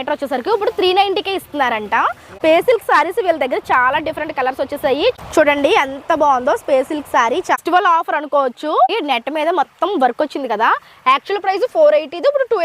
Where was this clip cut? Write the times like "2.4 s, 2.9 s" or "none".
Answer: 2.2 s, 5.2 s, 7.6 s, 8.9 s